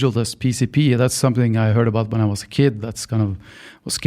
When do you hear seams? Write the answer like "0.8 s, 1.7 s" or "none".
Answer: none